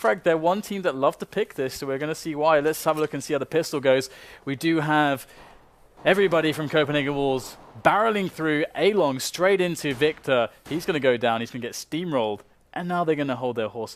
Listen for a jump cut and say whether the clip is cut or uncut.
cut